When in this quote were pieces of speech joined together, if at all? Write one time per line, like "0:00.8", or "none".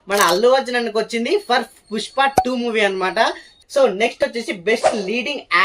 none